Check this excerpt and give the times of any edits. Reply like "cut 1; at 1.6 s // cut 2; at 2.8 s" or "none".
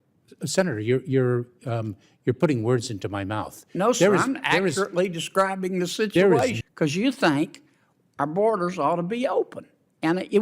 cut 1; at 6.6 s

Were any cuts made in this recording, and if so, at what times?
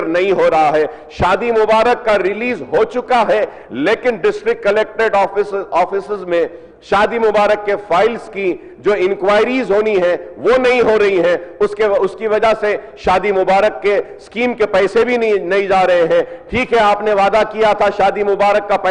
none

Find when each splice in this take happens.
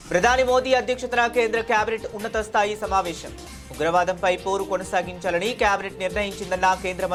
none

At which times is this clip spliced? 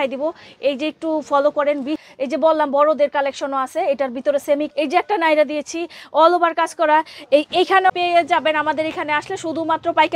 cut 1; at 2.0 s // cut 2; at 4.7 s // cut 3; at 7.9 s

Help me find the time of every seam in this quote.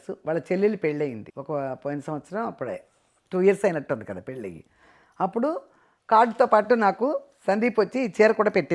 none

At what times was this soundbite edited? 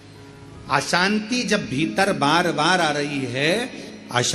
none

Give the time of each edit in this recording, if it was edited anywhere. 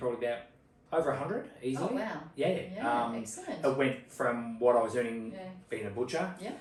none

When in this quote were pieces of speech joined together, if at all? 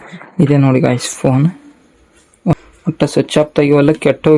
cut 1; at 2.5 s

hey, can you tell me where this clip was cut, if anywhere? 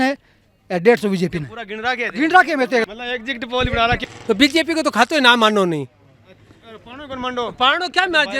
cut 1; at 2.9 s // cut 2; at 4.0 s

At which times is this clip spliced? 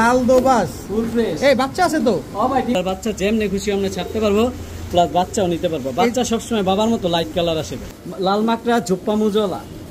cut 1; at 2.8 s // cut 2; at 7.8 s

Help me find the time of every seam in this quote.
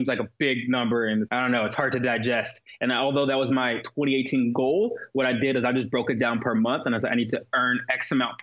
cut 1; at 1.3 s

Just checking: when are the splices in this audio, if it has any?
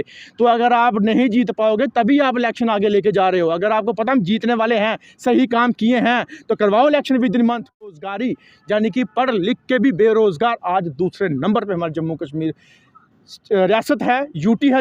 cut 1; at 7.9 s

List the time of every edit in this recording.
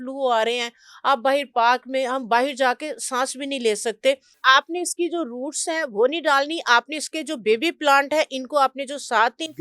cut 1; at 4.4 s

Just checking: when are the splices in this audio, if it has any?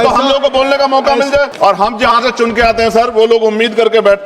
cut 1; at 1.5 s

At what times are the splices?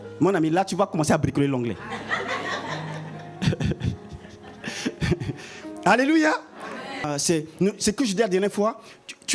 cut 1; at 7.0 s

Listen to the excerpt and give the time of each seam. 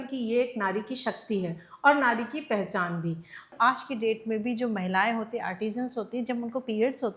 cut 1; at 3.5 s

